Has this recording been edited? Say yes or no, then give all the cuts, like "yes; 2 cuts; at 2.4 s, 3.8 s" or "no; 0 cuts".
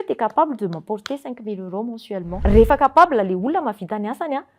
yes; 1 cut; at 2.3 s